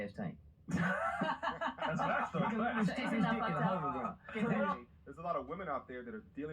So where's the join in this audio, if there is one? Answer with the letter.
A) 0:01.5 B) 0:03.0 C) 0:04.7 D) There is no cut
C